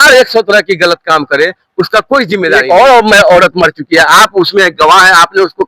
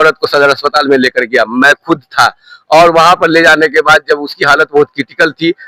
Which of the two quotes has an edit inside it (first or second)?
first